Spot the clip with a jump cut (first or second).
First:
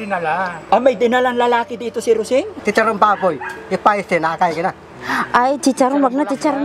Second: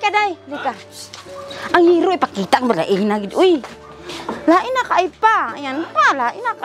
first